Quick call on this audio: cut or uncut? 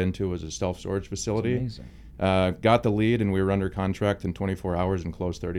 uncut